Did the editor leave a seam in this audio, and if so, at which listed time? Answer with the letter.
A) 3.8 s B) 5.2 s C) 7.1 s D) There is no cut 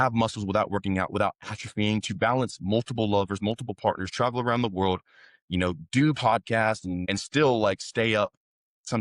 C